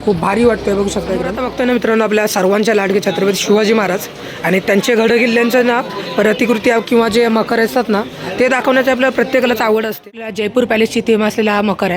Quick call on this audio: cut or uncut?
cut